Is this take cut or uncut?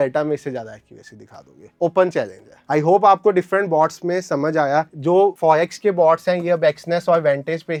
uncut